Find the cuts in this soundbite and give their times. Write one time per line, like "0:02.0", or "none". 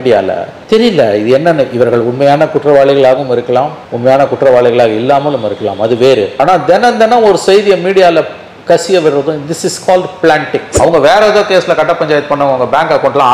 0:10.7